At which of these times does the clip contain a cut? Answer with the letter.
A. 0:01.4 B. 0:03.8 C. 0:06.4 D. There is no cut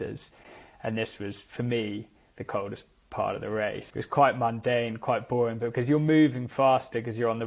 B